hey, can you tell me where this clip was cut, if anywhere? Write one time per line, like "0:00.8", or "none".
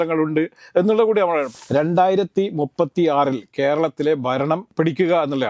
0:01.5